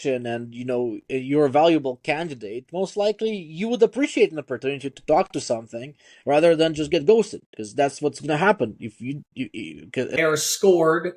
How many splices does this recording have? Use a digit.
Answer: 1